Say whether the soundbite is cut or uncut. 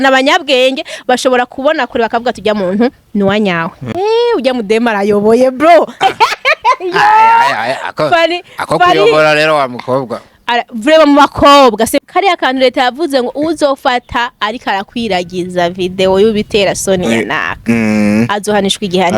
cut